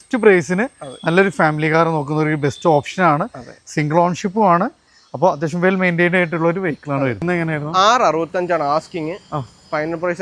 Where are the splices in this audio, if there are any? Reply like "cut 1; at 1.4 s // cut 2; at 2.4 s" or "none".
cut 1; at 7.2 s